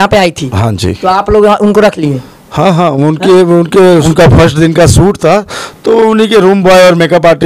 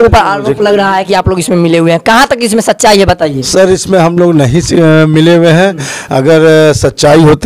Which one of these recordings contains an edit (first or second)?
first